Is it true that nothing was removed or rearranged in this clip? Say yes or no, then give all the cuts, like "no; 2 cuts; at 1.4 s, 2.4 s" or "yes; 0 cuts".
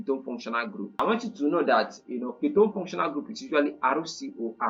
no; 1 cut; at 1.0 s